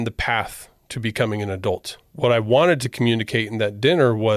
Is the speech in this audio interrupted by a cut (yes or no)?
yes